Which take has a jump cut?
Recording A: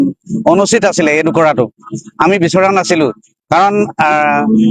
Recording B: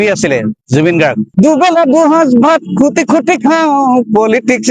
B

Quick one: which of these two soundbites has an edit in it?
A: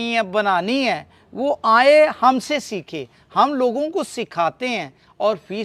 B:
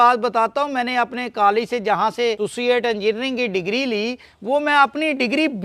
B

